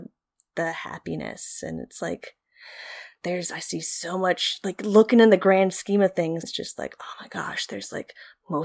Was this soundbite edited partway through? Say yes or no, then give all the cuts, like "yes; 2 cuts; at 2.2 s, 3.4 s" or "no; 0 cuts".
yes; 1 cut; at 6.4 s